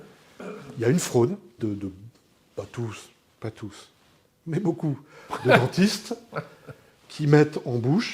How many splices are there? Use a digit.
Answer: 1